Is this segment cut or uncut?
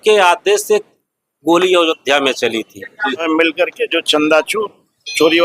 cut